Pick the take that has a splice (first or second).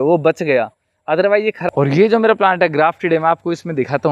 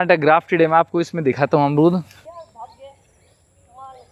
first